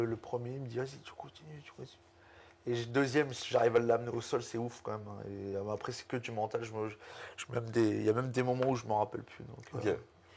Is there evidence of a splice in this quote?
no; 0 cuts

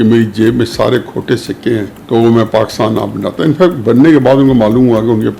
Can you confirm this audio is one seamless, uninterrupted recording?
no; 1 cut; at 1.9 s

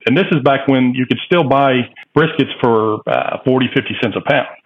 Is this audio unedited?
no; 1 cut; at 2.0 s

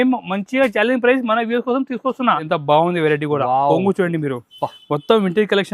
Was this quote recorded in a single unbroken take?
no; 1 cut; at 2.5 s

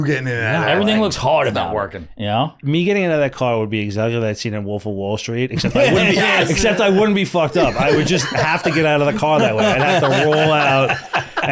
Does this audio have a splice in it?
no; 0 cuts

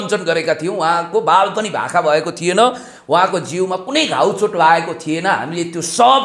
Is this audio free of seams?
yes; 0 cuts

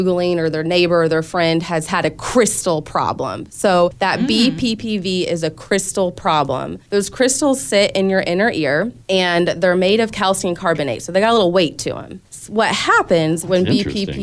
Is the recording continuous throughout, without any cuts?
yes; 0 cuts

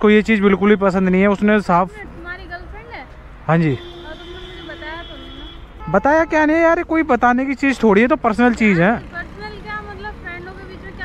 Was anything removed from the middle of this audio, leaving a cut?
no; 0 cuts

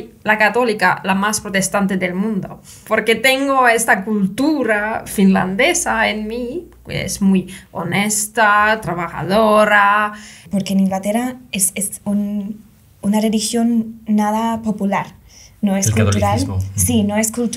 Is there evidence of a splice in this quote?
yes; 1 cut; at 10.4 s

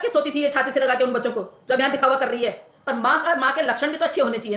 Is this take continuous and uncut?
no; 1 cut; at 2.7 s

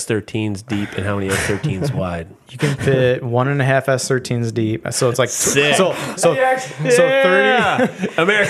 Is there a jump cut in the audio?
no; 0 cuts

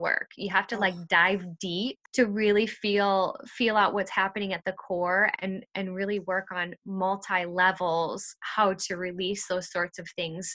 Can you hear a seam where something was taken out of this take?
yes; 1 cut; at 2.0 s

